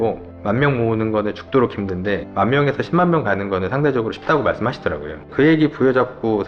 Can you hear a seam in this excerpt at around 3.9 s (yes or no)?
no